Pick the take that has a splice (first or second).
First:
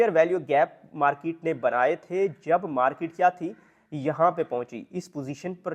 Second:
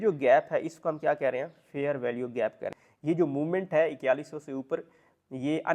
second